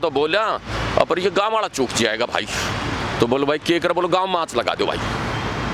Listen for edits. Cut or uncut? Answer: uncut